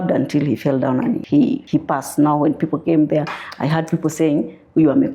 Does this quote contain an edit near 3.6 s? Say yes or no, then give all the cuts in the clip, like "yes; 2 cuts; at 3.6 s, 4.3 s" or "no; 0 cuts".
no; 1 cut; at 1.4 s